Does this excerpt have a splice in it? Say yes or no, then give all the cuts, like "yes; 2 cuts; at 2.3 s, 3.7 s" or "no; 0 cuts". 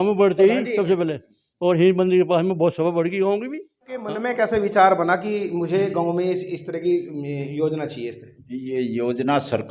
yes; 1 cut; at 4.2 s